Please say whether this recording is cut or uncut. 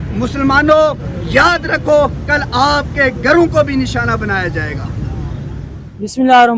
uncut